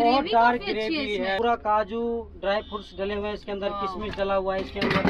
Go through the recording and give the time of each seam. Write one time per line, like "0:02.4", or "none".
0:01.4